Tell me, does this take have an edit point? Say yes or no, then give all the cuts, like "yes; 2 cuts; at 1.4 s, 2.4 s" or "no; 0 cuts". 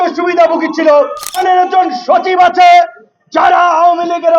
yes; 1 cut; at 1.4 s